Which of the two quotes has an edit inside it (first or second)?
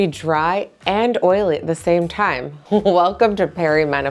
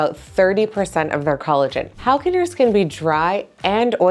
second